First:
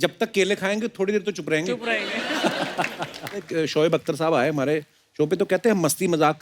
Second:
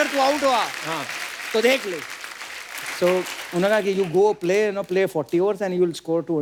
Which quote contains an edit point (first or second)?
first